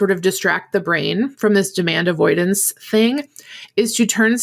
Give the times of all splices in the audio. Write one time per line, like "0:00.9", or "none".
none